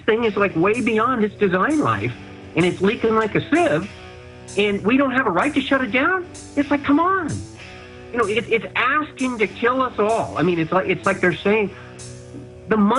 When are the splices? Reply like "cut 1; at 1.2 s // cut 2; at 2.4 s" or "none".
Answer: cut 1; at 5.3 s